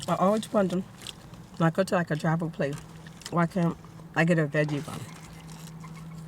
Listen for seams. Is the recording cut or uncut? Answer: uncut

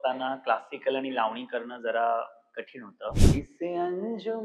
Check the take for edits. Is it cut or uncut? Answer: cut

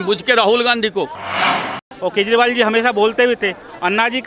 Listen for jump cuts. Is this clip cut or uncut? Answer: cut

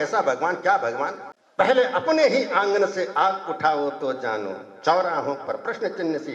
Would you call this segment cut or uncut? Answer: cut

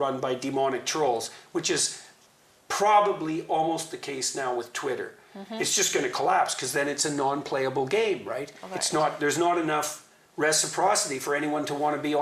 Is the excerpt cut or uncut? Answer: uncut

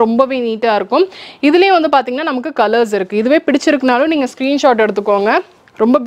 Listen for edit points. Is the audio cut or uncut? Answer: uncut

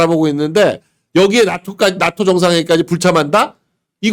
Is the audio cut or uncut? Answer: uncut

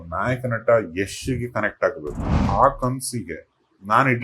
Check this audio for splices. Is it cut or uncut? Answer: cut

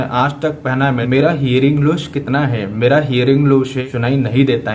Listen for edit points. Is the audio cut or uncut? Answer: cut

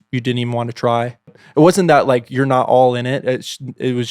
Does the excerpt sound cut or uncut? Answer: cut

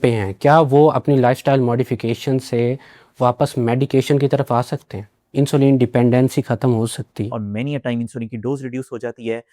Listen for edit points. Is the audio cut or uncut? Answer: cut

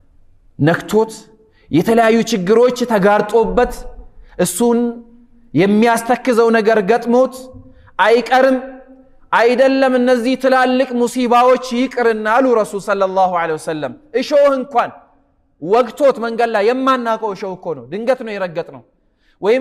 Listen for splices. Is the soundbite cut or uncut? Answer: uncut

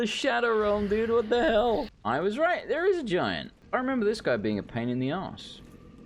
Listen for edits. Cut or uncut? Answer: cut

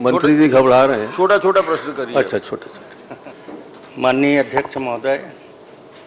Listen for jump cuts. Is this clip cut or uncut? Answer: cut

